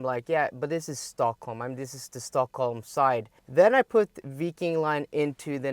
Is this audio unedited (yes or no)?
no